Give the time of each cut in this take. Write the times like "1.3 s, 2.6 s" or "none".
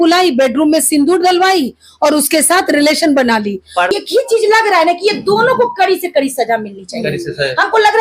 3.9 s